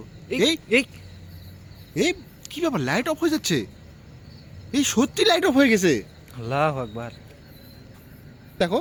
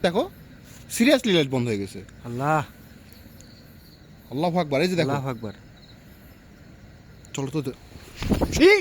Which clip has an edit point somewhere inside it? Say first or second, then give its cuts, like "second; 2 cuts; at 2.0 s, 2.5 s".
second; 1 cut; at 7.8 s